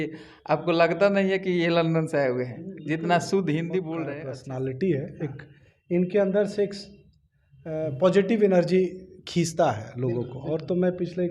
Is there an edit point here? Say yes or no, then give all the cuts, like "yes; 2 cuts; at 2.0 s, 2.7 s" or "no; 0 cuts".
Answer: yes; 1 cut; at 4.1 s